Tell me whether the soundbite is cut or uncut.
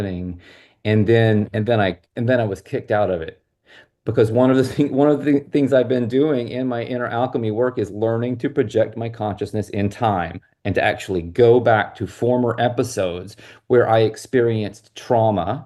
uncut